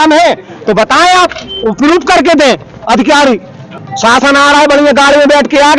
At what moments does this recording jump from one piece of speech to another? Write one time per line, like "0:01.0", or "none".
0:03.7